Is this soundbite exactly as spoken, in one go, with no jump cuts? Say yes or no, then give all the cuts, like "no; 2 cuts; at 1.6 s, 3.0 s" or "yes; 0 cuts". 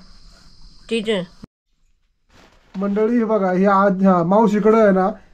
no; 1 cut; at 1.4 s